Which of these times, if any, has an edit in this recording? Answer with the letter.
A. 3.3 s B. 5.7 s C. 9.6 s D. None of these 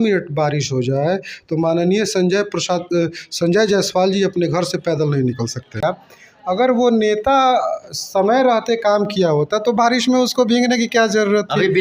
B